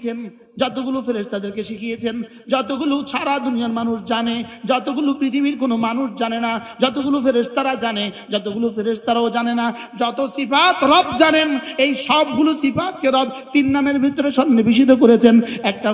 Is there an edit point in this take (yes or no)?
no